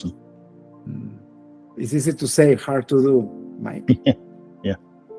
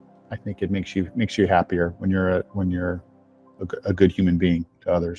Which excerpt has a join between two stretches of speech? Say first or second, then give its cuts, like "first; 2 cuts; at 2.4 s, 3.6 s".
first; 1 cut; at 1.3 s